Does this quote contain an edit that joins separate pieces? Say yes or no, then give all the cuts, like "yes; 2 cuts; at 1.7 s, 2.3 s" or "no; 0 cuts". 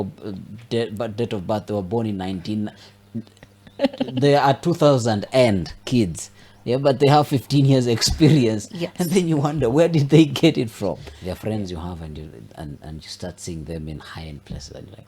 yes; 1 cut; at 11.1 s